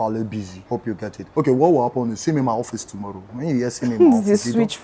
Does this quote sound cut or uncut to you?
cut